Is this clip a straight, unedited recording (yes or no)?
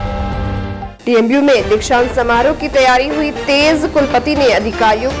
no